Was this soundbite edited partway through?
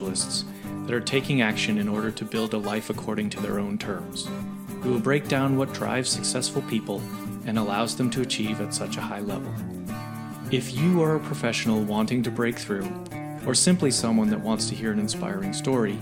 no; 0 cuts

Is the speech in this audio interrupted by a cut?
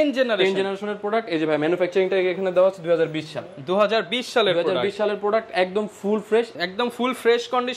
no; 0 cuts

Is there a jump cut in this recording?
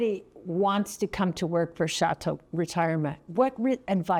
no; 0 cuts

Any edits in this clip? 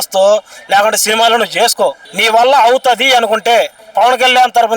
yes; 2 cuts; at 2.1 s, 3.8 s

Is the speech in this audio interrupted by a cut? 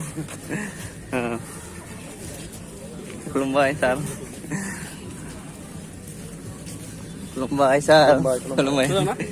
no; 0 cuts

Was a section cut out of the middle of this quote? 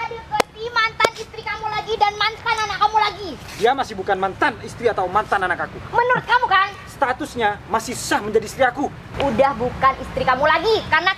yes; 1 cut; at 9.0 s

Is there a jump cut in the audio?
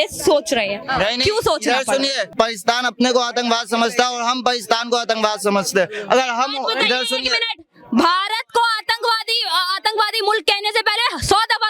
yes; 1 cut; at 2.3 s

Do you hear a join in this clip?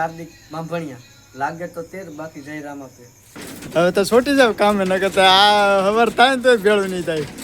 no; 0 cuts

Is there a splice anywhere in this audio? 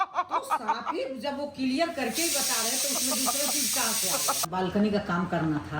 yes; 1 cut; at 4.5 s

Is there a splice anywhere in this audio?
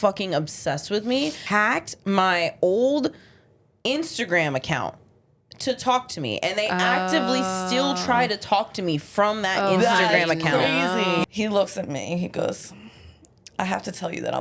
yes; 2 cuts; at 1.4 s, 11.2 s

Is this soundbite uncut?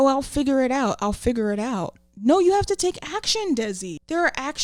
yes; 0 cuts

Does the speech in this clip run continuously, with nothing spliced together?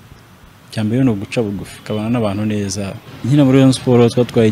no; 1 cut; at 3.0 s

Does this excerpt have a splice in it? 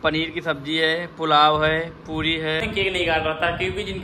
yes; 1 cut; at 2.6 s

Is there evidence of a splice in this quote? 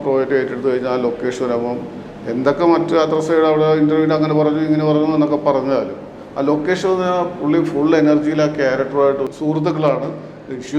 yes; 1 cut; at 9.3 s

